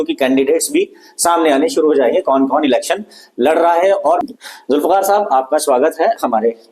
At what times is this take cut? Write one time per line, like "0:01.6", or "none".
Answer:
0:04.2